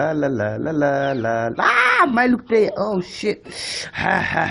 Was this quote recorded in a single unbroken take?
yes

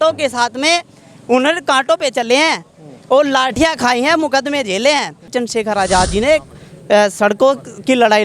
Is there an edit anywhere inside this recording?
yes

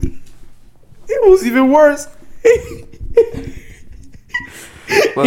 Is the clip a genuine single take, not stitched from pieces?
yes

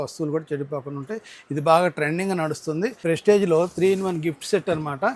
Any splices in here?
yes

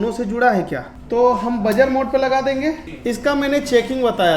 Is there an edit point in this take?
yes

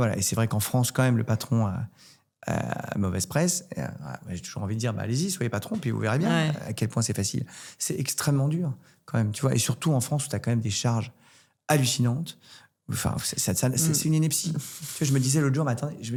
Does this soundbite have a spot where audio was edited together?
no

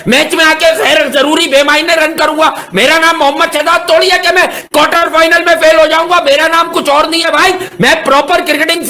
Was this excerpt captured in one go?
yes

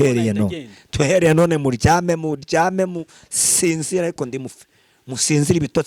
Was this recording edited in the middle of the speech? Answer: no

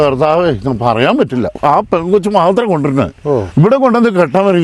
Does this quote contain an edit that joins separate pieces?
yes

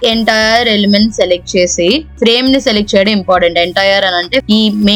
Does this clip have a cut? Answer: no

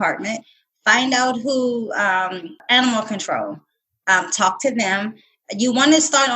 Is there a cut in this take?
yes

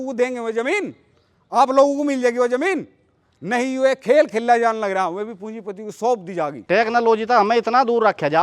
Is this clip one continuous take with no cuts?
yes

